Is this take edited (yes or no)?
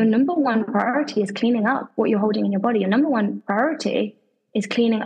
yes